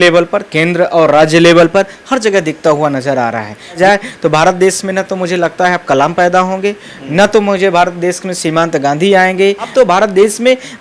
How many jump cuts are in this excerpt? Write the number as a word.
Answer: two